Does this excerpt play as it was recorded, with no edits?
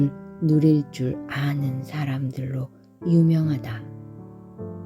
no; 1 cut; at 3.6 s

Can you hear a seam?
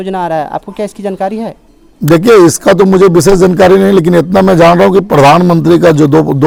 no; 0 cuts

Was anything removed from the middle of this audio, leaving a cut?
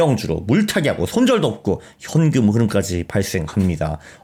no; 0 cuts

